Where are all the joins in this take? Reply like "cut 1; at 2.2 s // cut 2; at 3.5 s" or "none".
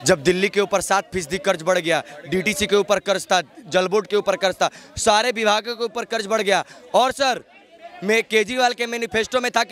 none